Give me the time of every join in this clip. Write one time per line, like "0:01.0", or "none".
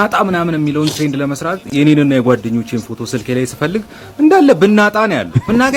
none